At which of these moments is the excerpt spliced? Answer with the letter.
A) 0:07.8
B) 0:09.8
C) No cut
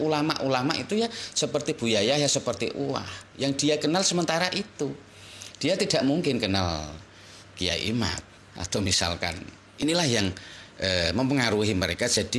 B